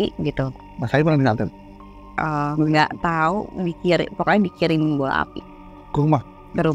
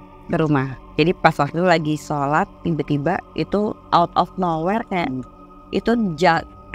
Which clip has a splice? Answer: second; 1 cut; at 2.6 s

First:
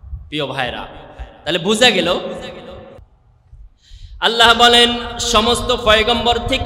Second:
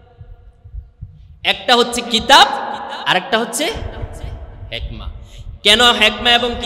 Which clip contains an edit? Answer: first; 1 cut; at 3.0 s

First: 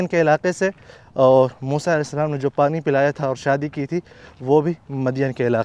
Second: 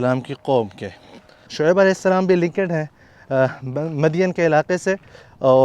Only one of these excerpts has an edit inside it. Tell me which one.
second; 1 cut; at 1.4 s

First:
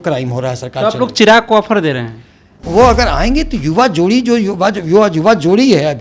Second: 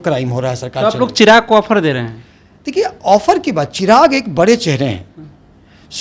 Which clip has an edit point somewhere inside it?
first; 1 cut; at 2.5 s

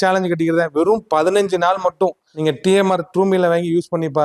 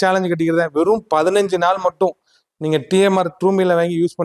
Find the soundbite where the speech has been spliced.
first; 1 cut; at 2.3 s

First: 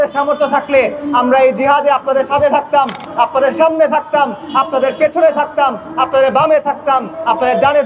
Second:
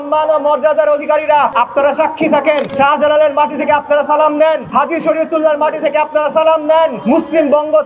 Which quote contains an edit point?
second; 4 cuts; at 1.5 s, 2.7 s, 4.6 s, 7.0 s

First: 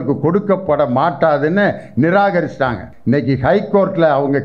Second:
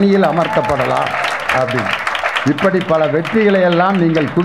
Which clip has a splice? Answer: first; 1 cut; at 2.9 s

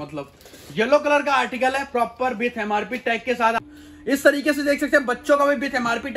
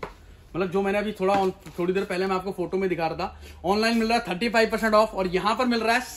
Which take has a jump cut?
first; 1 cut; at 3.6 s

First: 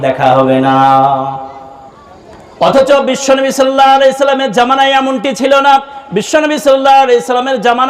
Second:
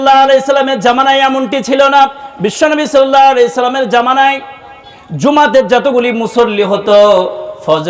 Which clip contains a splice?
first; 1 cut; at 2.2 s

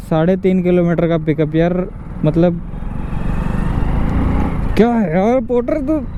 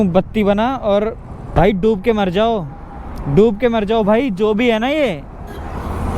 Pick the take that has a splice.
second; 1 cut; at 1.5 s

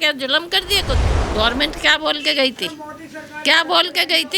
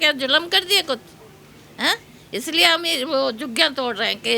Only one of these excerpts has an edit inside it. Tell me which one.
first; 1 cut; at 1.2 s

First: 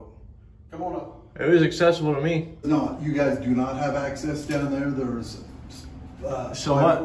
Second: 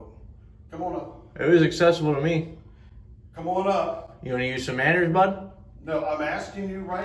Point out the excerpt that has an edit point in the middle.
first; 1 cut; at 2.7 s

